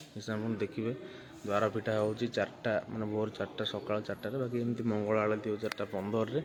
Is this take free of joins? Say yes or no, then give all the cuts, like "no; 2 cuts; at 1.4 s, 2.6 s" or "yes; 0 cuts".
yes; 0 cuts